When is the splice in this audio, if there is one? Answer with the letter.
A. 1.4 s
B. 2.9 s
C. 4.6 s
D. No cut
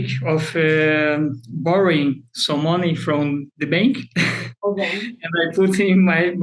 D